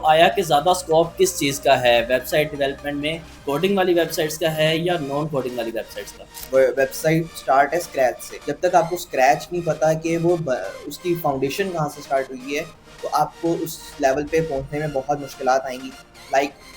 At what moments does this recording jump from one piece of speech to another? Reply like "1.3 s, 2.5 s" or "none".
3.4 s, 6.3 s